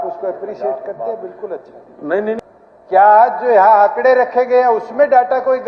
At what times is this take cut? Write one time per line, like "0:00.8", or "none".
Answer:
0:02.4